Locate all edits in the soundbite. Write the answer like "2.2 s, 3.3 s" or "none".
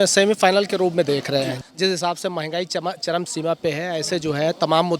1.5 s